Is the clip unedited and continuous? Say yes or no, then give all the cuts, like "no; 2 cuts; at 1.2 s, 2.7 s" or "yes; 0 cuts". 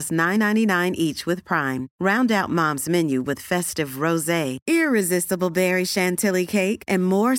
yes; 0 cuts